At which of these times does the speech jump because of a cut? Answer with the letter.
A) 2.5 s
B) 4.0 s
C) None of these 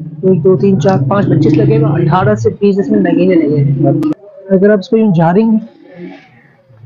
B